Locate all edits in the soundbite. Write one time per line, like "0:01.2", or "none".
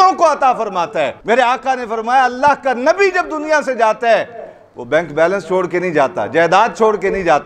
0:01.2